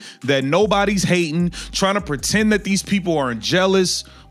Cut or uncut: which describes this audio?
uncut